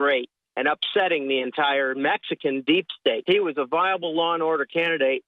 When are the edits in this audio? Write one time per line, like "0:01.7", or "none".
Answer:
0:03.2